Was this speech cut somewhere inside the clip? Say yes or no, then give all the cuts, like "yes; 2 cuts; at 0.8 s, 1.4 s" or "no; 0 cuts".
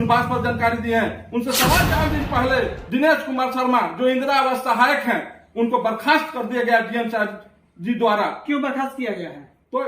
yes; 1 cut; at 2.0 s